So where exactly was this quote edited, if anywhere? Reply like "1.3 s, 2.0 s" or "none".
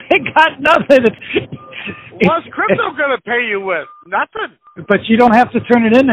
1.2 s, 4.6 s